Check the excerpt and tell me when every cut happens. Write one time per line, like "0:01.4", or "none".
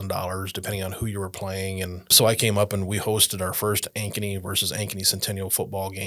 0:02.1